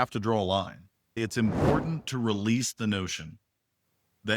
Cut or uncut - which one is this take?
cut